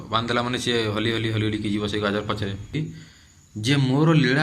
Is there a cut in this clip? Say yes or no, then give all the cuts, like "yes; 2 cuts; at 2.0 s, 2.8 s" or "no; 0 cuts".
yes; 1 cut; at 2.8 s